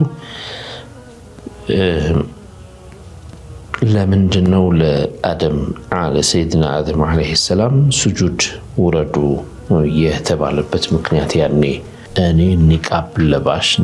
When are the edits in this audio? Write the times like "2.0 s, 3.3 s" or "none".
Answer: 11.9 s

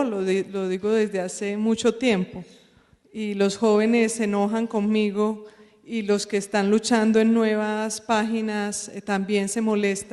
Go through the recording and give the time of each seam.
3.3 s

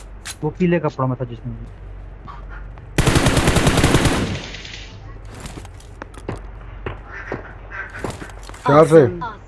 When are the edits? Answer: none

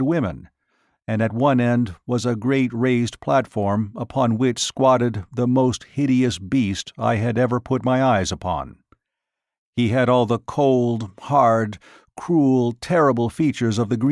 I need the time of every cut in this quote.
none

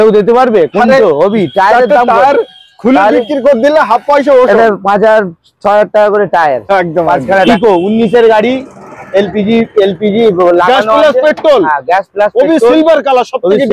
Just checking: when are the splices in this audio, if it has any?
7.5 s

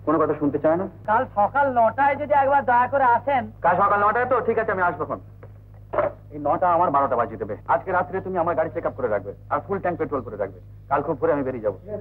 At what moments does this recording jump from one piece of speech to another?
1.0 s, 7.5 s

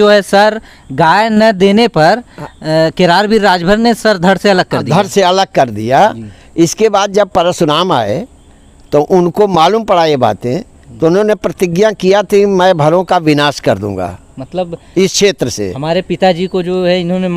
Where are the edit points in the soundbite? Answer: none

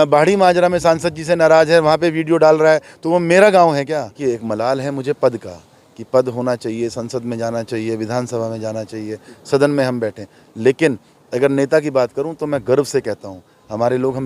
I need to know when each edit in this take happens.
4.1 s

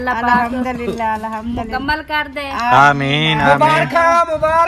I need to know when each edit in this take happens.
none

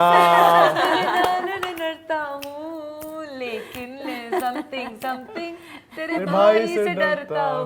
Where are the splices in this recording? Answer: none

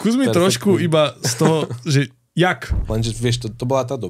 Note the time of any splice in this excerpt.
2.8 s

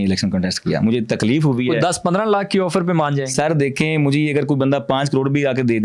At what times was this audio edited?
none

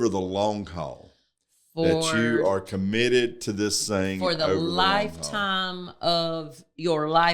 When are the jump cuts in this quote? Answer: none

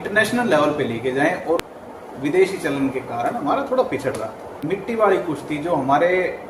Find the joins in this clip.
1.6 s, 4.6 s

